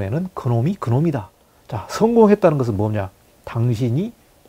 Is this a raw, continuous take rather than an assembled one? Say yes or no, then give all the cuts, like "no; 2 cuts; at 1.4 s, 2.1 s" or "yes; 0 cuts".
no; 1 cut; at 1.4 s